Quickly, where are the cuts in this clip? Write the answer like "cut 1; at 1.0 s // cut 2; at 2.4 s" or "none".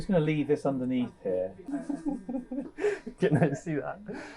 cut 1; at 1.6 s